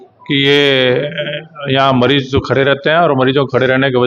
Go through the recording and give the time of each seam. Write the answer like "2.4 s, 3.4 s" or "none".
none

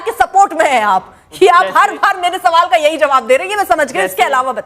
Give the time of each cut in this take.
none

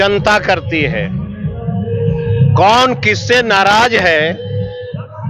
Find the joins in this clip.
none

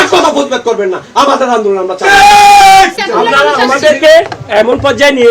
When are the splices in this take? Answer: 3.0 s

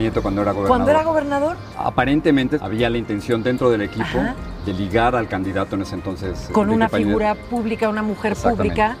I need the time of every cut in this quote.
1.7 s, 2.7 s

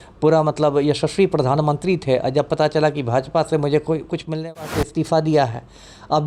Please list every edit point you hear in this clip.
4.4 s

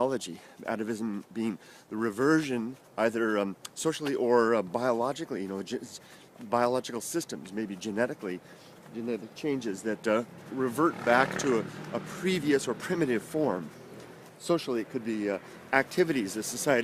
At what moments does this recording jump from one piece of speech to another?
none

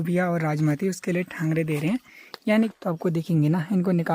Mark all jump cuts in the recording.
2.7 s

